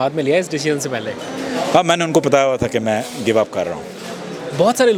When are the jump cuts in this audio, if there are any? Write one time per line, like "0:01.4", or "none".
none